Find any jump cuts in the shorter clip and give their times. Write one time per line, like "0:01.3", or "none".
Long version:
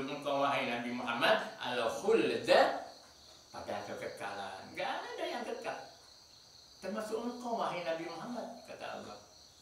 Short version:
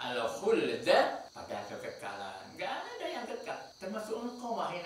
0:01.3
0:03.7